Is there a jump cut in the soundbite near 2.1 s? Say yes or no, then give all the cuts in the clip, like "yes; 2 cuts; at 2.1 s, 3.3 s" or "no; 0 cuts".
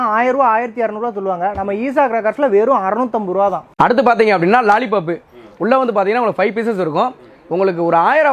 no; 1 cut; at 3.6 s